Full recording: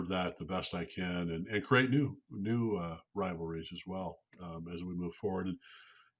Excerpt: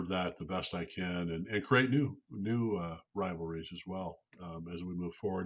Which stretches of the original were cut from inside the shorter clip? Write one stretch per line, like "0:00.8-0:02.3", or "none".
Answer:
none